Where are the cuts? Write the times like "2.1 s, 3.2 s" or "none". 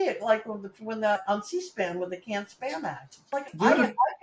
1.2 s, 3.1 s